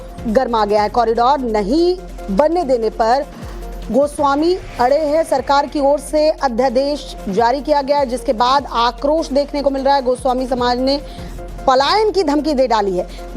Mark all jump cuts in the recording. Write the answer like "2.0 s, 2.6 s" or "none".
2.1 s